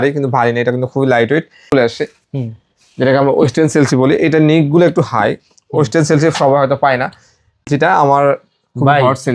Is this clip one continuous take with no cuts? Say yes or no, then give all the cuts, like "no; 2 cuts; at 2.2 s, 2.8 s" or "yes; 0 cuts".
no; 2 cuts; at 1.7 s, 7.7 s